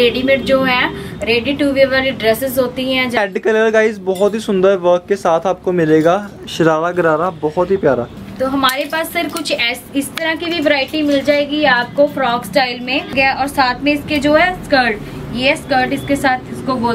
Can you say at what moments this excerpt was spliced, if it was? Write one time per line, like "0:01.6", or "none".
0:03.2
0:08.2
0:13.1